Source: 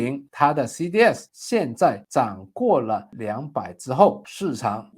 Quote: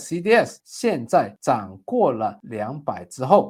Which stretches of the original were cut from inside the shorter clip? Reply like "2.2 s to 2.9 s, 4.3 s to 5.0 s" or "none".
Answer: none